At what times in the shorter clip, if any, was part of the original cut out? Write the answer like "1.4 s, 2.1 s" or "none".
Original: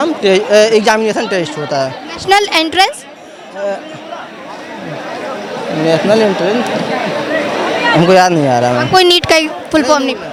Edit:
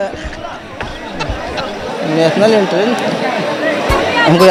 none